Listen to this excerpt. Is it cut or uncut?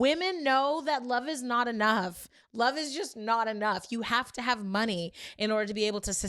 cut